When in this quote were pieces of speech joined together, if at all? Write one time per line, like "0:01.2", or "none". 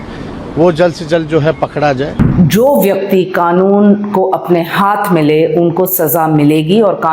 0:02.2